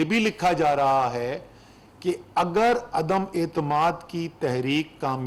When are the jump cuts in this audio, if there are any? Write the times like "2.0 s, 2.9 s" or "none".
none